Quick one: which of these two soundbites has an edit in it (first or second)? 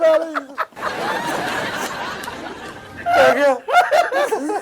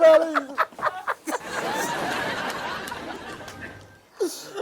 first